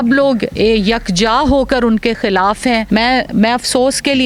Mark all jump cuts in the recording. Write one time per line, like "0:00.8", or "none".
0:02.8